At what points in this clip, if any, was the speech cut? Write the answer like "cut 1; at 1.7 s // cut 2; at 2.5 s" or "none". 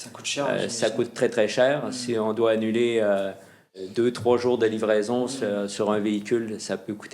cut 1; at 3.8 s